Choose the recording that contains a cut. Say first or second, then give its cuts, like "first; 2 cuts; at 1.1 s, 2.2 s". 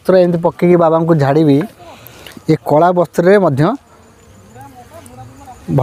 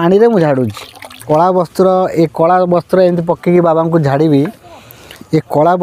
second; 1 cut; at 1.2 s